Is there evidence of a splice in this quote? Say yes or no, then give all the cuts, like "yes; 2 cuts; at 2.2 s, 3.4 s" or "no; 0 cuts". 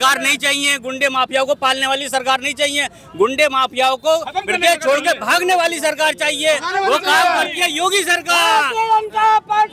no; 0 cuts